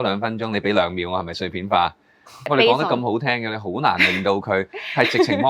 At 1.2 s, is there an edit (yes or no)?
no